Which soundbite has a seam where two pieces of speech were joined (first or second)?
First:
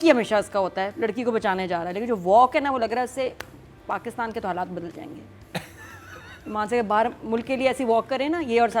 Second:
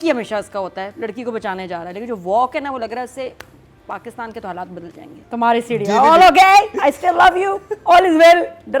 second